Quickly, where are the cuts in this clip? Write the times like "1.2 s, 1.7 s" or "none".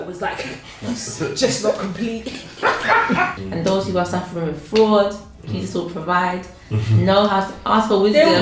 3.4 s